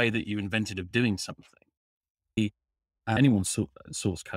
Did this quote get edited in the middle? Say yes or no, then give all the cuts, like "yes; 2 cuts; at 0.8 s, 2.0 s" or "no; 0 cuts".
yes; 1 cut; at 2.4 s